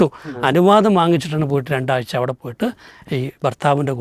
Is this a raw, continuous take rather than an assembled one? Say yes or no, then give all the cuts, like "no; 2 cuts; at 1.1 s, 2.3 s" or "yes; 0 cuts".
yes; 0 cuts